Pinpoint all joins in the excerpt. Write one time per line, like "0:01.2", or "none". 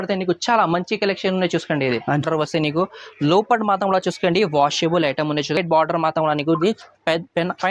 0:02.2
0:05.6